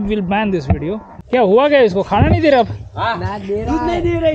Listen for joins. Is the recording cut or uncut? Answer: cut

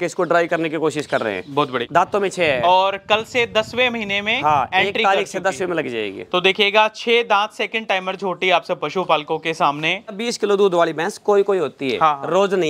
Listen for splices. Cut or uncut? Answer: cut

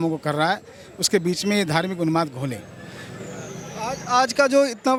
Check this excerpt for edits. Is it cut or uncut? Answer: uncut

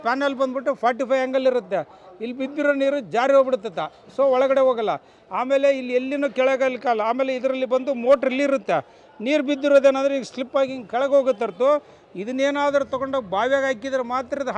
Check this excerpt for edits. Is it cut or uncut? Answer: uncut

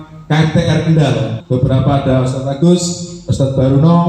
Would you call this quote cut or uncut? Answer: cut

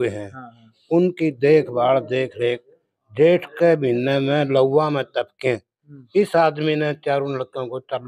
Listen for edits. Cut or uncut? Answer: uncut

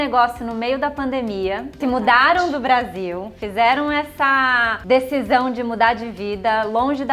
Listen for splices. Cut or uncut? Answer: cut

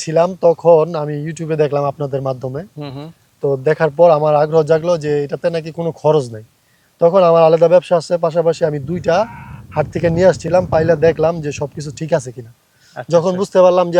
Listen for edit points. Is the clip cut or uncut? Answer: uncut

